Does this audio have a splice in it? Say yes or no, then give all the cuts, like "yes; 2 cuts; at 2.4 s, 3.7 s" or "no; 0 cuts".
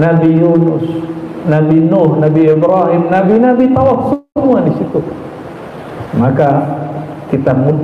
no; 0 cuts